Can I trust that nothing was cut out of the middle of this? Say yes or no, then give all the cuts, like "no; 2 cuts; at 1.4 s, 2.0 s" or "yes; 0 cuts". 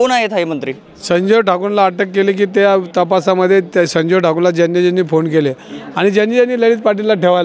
yes; 0 cuts